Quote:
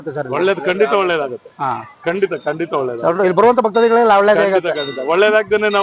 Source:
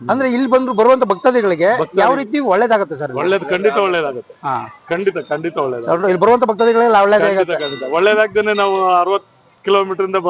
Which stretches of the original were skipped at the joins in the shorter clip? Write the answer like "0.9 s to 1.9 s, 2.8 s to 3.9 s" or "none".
none